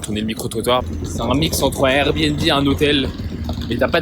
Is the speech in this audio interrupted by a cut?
yes; 1 cut; at 0.9 s

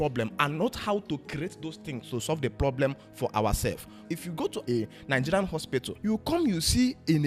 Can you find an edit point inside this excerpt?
yes; 2 cuts; at 4.1 s, 5.9 s

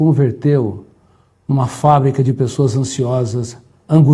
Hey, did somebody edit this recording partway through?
no; 0 cuts

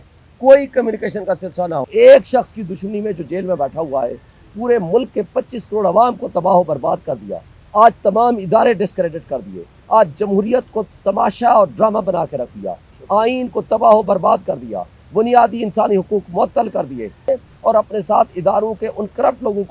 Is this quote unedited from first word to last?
no; 2 cuts; at 1.9 s, 17.3 s

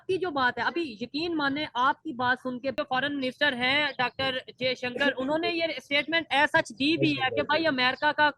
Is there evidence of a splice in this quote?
yes; 1 cut; at 2.7 s

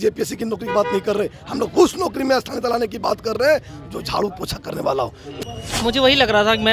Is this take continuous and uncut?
no; 1 cut; at 5.3 s

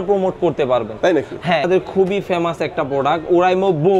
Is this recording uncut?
no; 1 cut; at 1.7 s

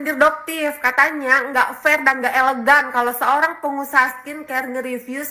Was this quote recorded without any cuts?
yes; 0 cuts

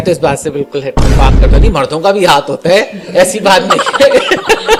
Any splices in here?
no; 0 cuts

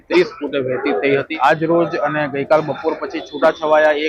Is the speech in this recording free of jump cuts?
no; 1 cut; at 1.3 s

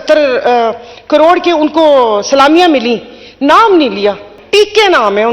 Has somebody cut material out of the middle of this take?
yes; 1 cut; at 4.4 s

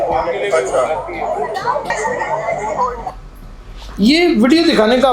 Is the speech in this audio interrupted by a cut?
yes; 1 cut; at 1.9 s

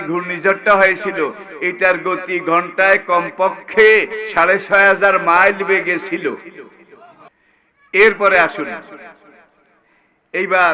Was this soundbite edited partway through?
yes; 1 cut; at 7.2 s

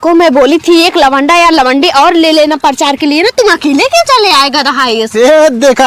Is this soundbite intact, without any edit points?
yes; 0 cuts

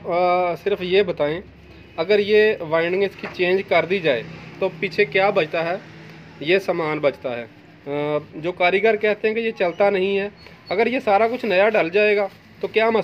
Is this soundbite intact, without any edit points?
yes; 0 cuts

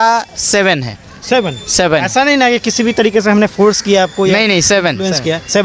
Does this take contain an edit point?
no; 0 cuts

